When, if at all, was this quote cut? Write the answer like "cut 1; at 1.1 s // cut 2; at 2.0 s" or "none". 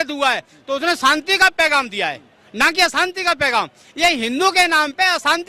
none